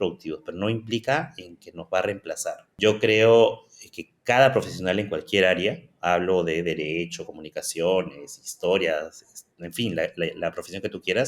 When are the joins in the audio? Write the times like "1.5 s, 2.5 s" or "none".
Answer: 2.7 s

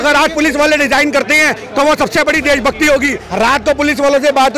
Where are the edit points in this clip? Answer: 3.2 s

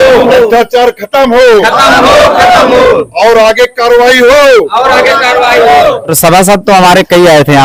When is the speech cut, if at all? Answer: none

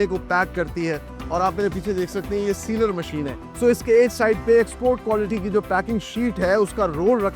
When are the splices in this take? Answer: none

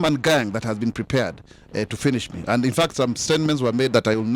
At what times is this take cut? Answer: none

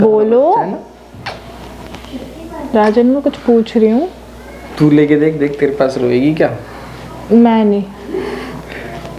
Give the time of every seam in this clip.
none

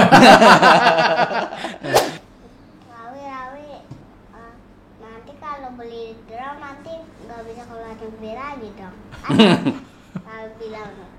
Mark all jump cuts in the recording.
2.1 s

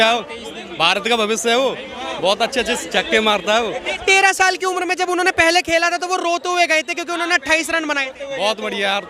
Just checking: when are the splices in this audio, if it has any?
none

